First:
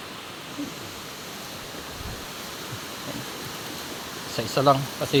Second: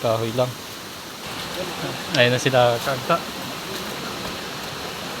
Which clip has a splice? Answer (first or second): second